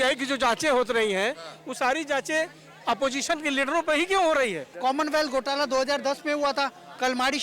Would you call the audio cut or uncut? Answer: cut